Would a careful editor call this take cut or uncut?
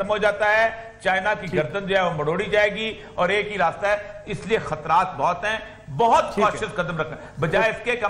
uncut